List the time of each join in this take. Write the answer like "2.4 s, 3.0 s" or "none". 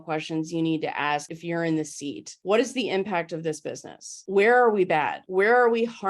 1.3 s, 2.3 s, 4.2 s, 5.2 s